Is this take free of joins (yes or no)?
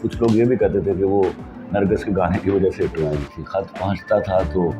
no